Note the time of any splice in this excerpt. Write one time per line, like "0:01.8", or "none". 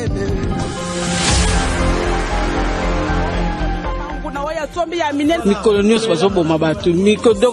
0:04.2